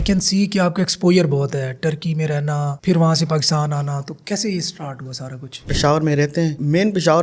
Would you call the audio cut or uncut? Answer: uncut